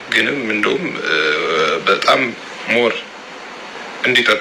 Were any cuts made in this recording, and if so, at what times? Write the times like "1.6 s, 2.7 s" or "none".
none